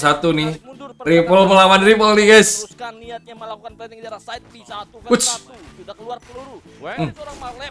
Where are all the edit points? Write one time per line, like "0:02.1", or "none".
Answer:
none